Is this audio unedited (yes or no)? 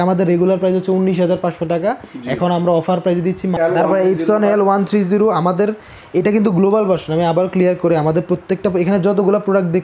no